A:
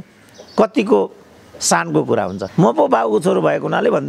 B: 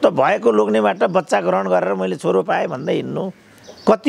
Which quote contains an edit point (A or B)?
A